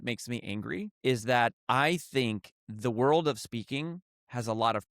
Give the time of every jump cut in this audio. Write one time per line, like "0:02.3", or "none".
0:00.9